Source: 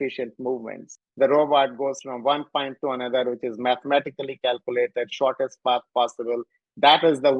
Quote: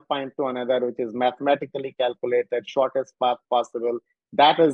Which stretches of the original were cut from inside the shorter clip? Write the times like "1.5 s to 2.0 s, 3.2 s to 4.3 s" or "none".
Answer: none

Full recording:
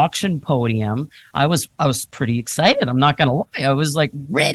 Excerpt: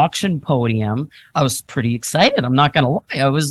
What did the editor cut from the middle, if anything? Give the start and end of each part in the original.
1.2 s to 1.7 s

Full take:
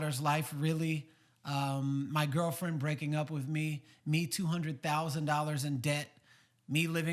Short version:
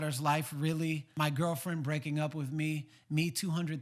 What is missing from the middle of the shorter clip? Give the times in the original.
1.1 s to 2.1 s

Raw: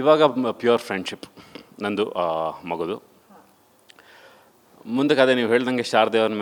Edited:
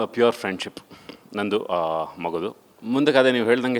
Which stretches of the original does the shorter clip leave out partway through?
3.1 s to 4.7 s

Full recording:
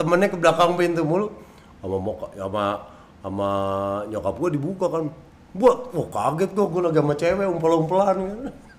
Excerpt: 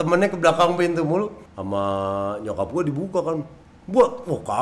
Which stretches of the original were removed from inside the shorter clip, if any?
1.5 s to 3.1 s

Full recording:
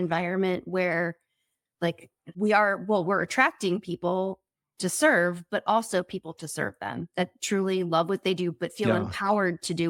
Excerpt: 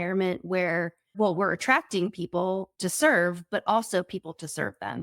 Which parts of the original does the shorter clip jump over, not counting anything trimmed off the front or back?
1.3 s to 2.8 s, 4.4 s to 4.7 s

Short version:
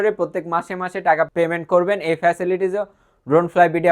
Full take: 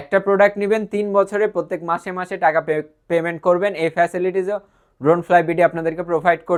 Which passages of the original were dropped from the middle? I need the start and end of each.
2.6 s to 3.0 s

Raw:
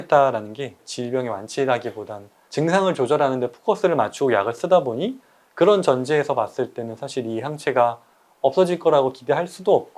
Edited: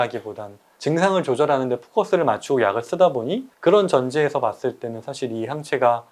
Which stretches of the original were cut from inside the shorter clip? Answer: 5.1 s to 5.4 s

